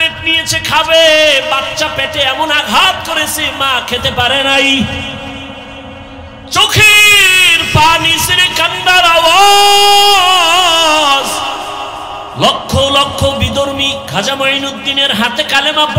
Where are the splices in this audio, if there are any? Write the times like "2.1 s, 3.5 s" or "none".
12.2 s